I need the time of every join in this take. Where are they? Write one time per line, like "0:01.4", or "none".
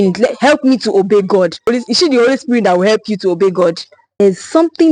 0:01.7
0:04.2

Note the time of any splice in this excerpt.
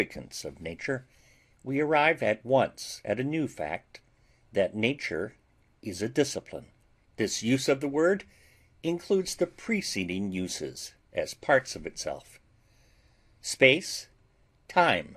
0:01.5

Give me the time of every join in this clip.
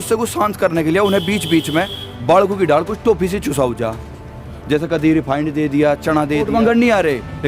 0:06.5

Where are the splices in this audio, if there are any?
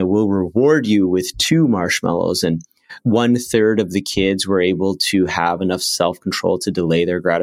0:02.9

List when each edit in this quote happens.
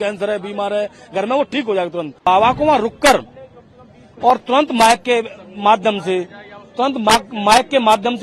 0:02.3

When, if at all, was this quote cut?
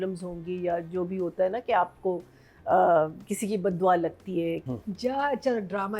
0:04.6

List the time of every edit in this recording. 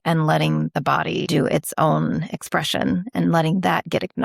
0:01.3

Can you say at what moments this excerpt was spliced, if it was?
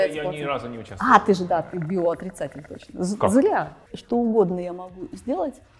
0:03.8

